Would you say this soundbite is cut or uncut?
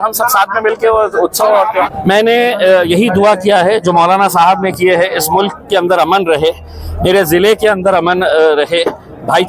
cut